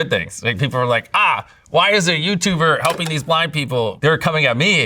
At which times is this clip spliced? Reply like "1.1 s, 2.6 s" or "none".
3.9 s